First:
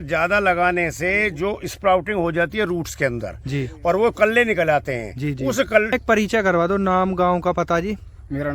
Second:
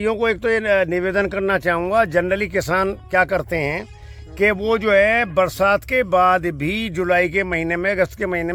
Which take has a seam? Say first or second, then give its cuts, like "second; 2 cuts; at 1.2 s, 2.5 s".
first; 1 cut; at 5.9 s